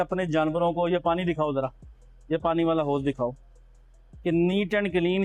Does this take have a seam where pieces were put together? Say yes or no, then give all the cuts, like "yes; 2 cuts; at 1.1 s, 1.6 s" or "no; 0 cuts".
no; 0 cuts